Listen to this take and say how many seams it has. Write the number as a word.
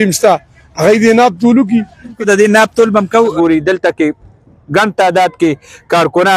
two